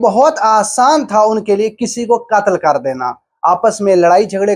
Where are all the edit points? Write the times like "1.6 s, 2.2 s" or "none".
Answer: none